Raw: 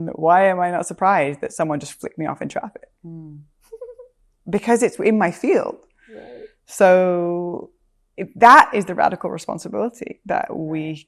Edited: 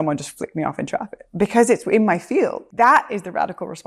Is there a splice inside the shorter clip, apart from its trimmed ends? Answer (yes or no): yes